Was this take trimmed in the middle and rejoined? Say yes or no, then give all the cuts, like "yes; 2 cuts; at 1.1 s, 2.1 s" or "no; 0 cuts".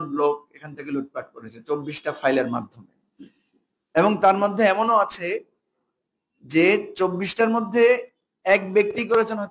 no; 0 cuts